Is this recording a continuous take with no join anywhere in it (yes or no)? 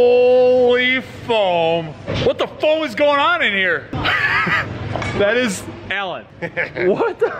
yes